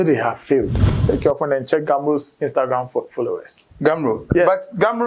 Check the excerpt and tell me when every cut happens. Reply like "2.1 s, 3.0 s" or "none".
0.9 s